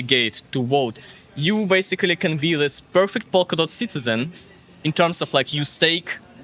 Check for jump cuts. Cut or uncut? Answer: uncut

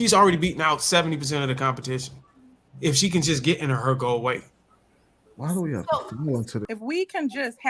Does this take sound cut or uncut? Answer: cut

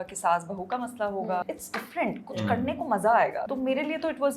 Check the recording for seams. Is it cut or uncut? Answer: cut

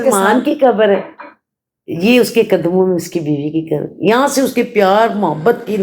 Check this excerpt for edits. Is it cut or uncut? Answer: uncut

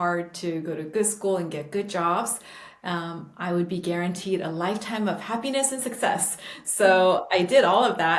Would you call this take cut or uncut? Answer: uncut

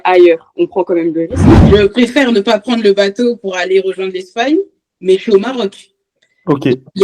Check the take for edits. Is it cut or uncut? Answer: cut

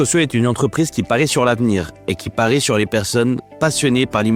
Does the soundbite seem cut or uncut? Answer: uncut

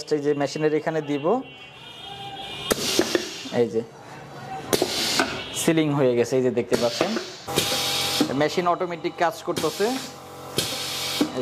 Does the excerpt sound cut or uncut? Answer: cut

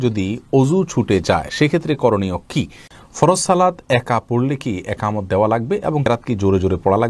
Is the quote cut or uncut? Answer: cut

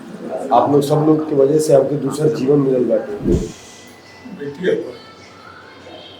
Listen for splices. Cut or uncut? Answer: cut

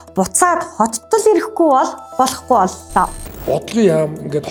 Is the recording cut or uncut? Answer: uncut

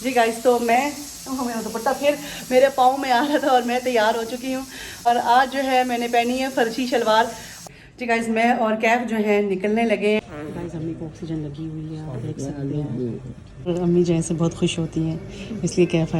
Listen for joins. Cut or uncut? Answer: cut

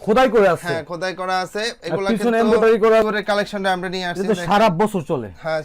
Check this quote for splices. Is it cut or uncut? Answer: cut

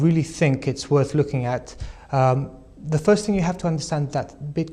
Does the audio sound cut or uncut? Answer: uncut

